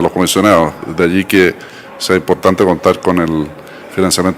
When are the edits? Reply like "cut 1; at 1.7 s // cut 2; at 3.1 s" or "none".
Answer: cut 1; at 0.9 s

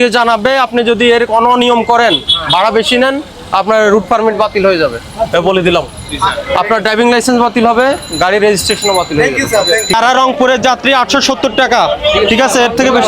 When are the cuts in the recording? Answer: cut 1; at 9.9 s

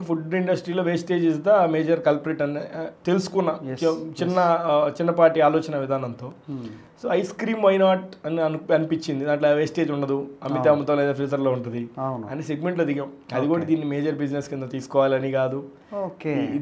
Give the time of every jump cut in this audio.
none

